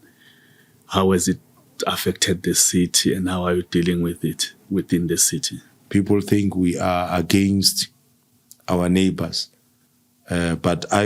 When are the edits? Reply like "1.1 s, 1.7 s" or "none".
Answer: 5.9 s